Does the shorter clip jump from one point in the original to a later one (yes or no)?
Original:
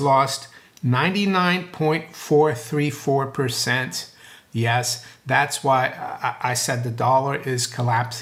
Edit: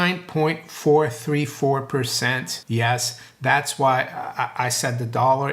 yes